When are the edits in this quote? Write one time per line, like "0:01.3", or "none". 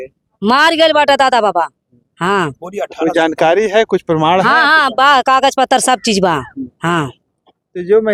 none

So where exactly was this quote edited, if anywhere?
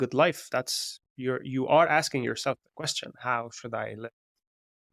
none

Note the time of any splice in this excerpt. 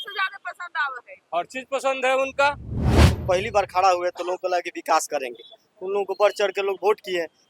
0:03.1

